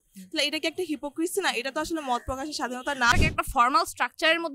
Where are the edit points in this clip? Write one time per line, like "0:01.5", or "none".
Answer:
0:03.1